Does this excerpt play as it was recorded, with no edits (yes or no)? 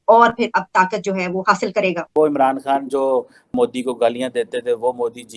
no